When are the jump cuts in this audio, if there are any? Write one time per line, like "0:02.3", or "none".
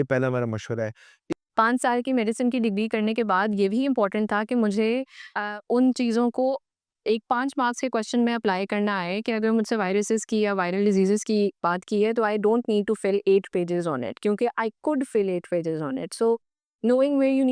0:01.2